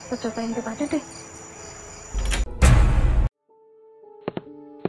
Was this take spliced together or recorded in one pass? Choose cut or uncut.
cut